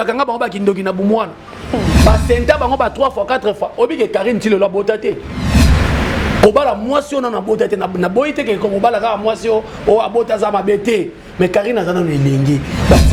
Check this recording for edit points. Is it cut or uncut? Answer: uncut